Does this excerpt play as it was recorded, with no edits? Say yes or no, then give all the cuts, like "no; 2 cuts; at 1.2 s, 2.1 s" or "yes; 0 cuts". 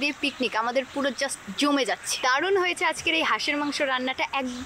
no; 1 cut; at 2.2 s